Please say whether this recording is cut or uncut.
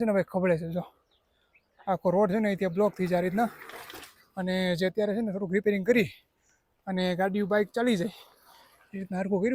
uncut